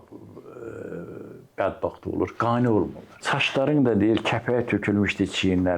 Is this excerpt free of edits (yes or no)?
no